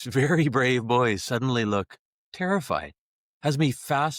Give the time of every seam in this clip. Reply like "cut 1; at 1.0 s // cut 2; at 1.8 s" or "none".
none